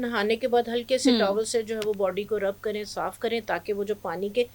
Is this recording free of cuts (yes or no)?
yes